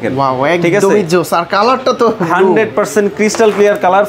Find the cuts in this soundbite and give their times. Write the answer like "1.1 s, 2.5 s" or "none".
none

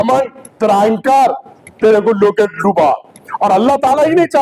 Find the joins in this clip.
none

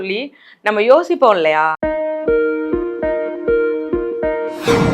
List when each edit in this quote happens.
1.8 s

